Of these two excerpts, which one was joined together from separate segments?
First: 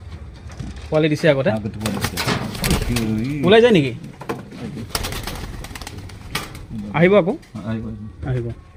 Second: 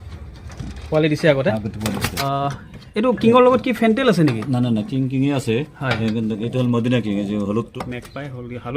second; 2 cuts; at 2.2 s, 7.7 s

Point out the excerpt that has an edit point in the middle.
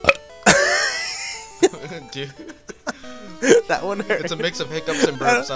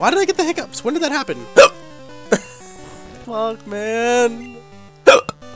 second; 1 cut; at 2.9 s

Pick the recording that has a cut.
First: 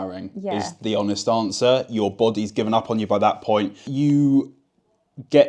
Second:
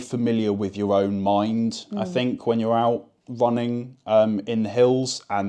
first; 1 cut; at 3.8 s

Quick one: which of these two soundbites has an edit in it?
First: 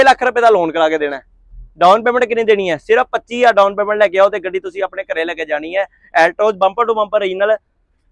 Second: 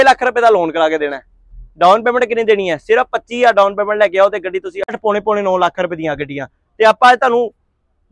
second; 1 cut; at 5.0 s

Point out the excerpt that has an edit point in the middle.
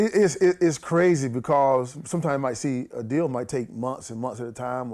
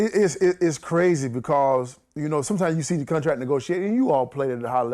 first; 1 cut; at 2.0 s

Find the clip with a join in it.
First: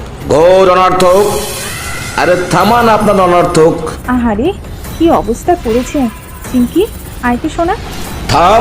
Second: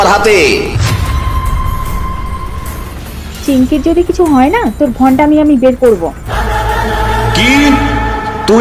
first; 1 cut; at 3.9 s

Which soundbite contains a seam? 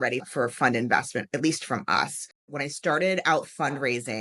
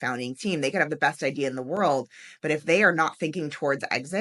first; 1 cut; at 2.5 s

